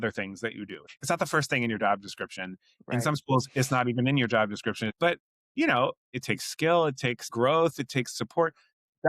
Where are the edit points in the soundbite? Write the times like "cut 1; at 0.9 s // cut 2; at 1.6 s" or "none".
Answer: cut 1; at 0.9 s // cut 2; at 4.9 s // cut 3; at 6.1 s // cut 4; at 7.2 s

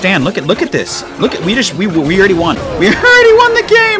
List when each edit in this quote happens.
cut 1; at 2.6 s

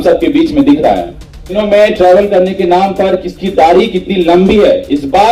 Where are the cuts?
cut 1; at 1.6 s

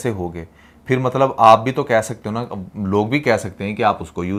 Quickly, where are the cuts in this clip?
none

